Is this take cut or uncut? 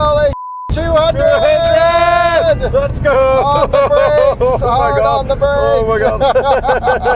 uncut